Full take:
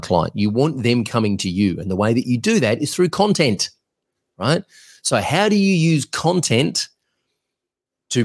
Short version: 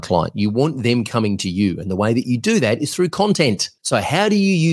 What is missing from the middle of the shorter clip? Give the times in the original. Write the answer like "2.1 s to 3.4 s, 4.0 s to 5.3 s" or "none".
3.7 s to 4.9 s